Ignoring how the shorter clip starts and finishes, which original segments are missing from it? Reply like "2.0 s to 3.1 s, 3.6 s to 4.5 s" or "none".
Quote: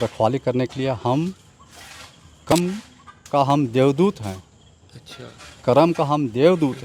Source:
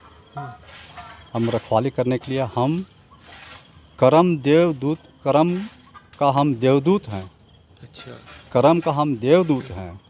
4.0 s to 5.4 s